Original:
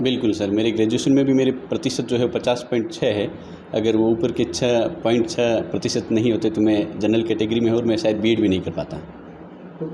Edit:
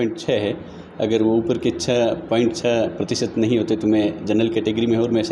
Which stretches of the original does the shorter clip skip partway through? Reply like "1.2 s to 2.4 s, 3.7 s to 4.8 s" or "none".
none